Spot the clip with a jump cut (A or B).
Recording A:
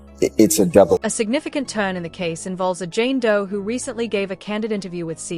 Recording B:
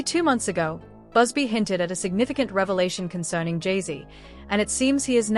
A